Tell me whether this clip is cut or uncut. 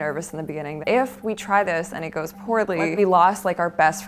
cut